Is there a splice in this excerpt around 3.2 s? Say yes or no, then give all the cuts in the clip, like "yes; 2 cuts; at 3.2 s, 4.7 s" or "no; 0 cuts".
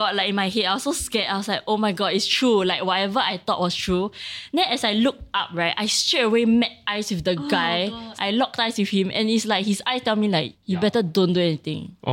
no; 2 cuts; at 8.0 s, 10.6 s